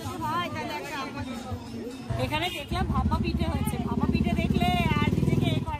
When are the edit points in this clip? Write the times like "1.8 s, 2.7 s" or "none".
2.1 s